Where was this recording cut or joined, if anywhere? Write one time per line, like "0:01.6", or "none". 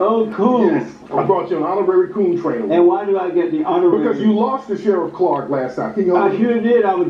0:01.0